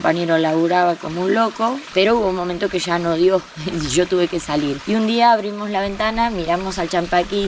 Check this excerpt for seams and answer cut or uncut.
cut